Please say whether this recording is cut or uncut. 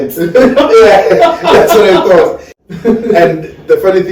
cut